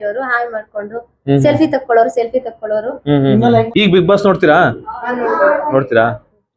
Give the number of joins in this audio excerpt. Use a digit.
1